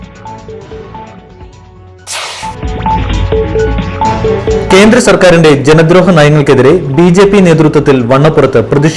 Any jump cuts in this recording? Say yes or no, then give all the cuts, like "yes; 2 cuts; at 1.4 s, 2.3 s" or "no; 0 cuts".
no; 0 cuts